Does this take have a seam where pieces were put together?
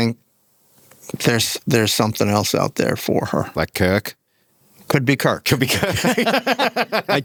no; 0 cuts

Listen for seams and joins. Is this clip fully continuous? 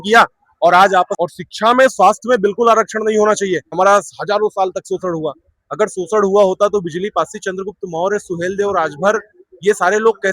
no; 2 cuts; at 1.1 s, 3.7 s

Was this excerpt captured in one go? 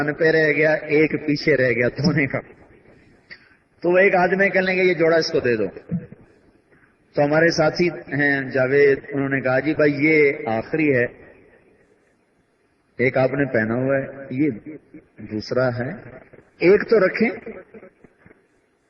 no; 1 cut; at 10.9 s

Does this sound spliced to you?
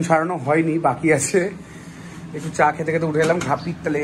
no; 0 cuts

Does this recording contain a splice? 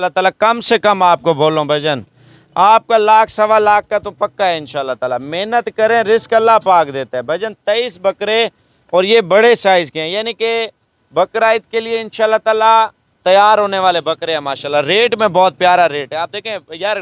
no; 0 cuts

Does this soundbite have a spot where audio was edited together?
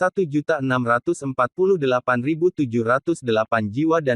no; 0 cuts

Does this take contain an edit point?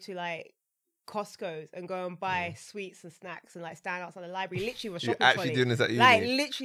no; 0 cuts

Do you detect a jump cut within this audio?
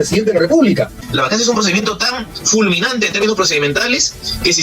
yes; 1 cut; at 1.0 s

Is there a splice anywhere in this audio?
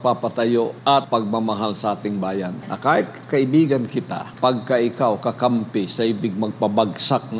yes; 3 cuts; at 0.9 s, 2.6 s, 4.2 s

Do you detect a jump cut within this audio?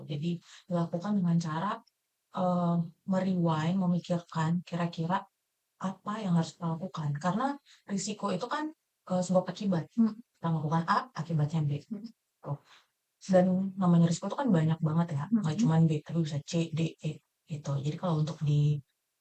no; 0 cuts

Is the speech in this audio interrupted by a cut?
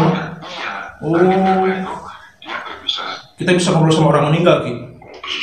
yes; 1 cut; at 3.2 s

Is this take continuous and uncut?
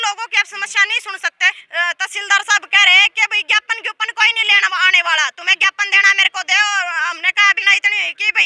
no; 2 cuts; at 1.6 s, 7.6 s

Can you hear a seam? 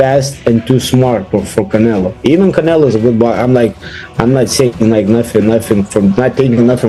no; 0 cuts

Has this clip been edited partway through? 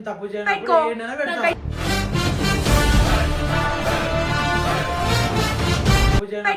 no; 0 cuts

